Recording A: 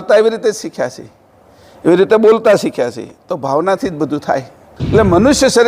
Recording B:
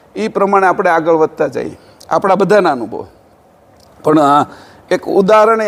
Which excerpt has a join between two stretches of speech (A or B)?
A